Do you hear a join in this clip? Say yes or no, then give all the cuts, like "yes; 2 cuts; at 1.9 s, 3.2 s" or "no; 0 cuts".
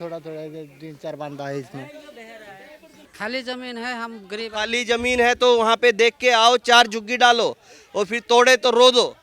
yes; 1 cut; at 3.0 s